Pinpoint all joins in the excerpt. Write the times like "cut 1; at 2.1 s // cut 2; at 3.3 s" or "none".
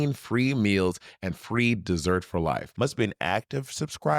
cut 1; at 2.6 s